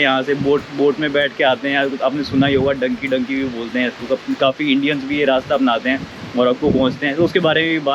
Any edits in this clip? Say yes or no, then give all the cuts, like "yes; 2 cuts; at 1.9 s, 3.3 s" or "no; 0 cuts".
no; 0 cuts